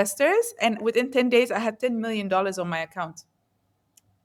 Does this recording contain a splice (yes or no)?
no